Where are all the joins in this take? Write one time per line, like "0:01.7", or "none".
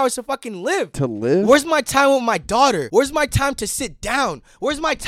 0:00.9
0:02.9

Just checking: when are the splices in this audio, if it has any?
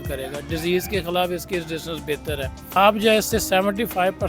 0:02.7

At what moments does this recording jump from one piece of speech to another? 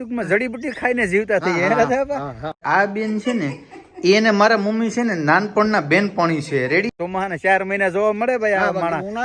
0:02.6
0:07.0

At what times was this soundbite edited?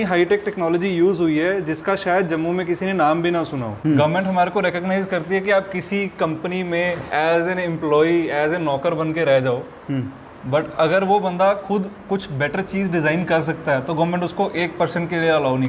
0:03.7
0:07.0

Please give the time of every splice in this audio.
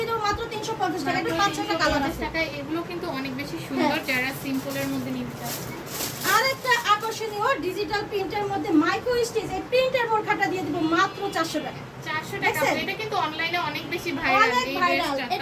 none

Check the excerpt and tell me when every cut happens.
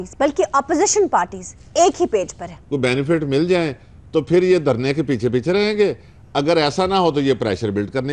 0:02.5

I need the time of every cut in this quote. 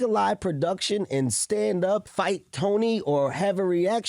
0:02.0

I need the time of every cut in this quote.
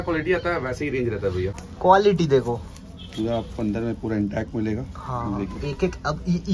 0:01.5

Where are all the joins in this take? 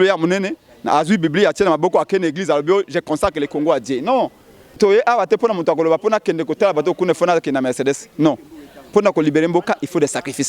0:04.8

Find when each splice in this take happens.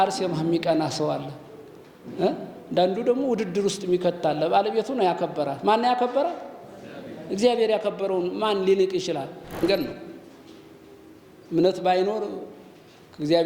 0:09.6

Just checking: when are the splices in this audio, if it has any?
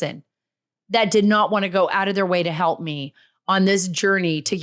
none

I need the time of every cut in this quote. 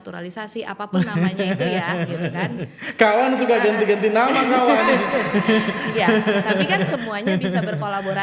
none

